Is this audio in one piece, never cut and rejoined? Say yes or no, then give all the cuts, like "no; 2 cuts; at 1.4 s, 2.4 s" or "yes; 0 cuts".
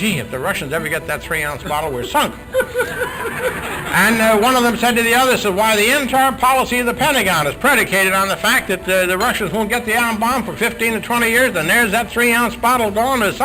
yes; 0 cuts